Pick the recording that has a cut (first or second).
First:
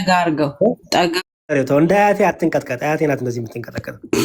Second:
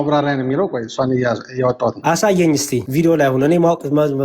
second